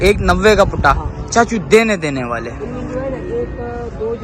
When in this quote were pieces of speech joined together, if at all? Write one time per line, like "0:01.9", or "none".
none